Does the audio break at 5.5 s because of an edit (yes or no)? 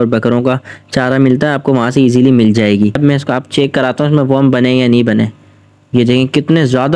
no